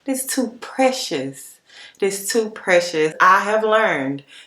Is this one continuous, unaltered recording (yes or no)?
no